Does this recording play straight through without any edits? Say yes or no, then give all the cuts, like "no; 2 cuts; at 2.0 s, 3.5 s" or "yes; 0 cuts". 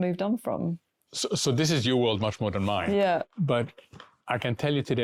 yes; 0 cuts